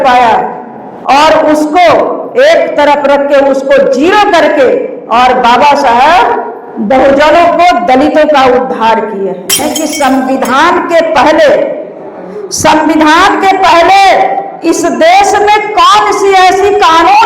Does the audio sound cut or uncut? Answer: cut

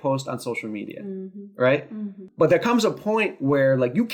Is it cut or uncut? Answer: cut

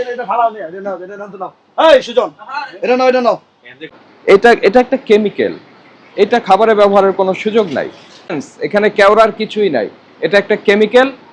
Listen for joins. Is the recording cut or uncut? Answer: cut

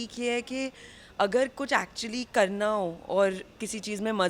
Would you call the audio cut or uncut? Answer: uncut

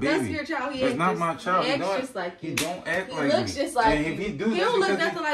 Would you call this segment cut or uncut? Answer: uncut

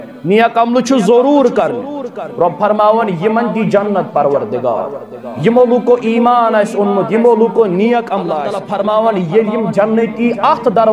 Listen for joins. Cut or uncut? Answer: cut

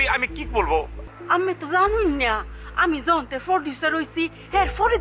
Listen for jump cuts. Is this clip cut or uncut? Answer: cut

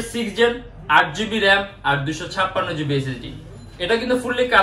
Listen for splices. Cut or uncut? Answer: uncut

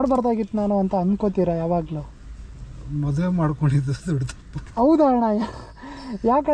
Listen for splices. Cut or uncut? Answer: uncut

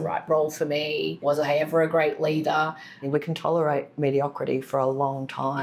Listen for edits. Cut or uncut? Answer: cut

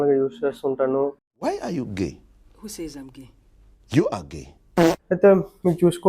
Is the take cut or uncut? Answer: cut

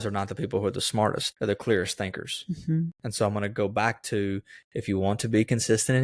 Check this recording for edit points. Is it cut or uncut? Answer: cut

